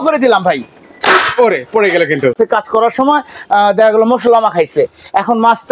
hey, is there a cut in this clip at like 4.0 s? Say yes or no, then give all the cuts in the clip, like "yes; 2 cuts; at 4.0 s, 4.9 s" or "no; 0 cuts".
no; 1 cut; at 2.3 s